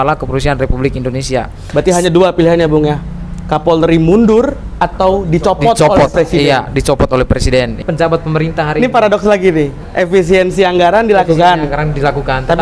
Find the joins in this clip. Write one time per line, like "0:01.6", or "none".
0:07.8